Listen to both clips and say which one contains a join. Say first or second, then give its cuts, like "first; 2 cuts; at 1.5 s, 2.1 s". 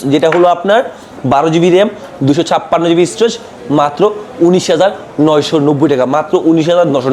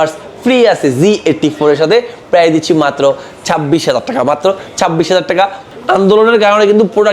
second; 1 cut; at 5.6 s